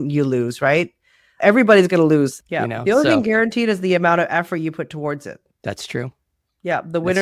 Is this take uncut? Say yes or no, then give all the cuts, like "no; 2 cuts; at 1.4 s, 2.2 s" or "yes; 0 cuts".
no; 1 cut; at 2.4 s